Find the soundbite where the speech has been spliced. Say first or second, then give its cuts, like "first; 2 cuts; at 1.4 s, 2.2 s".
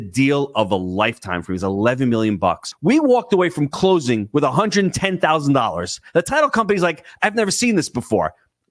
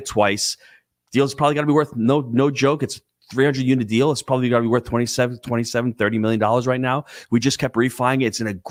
first; 1 cut; at 2.7 s